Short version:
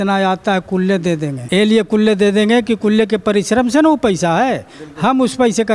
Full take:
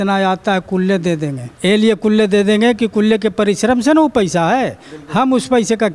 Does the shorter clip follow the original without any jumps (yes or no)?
no